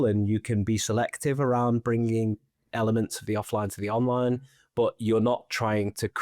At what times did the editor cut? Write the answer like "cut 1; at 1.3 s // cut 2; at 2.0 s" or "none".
none